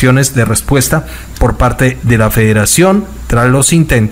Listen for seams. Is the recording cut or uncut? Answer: uncut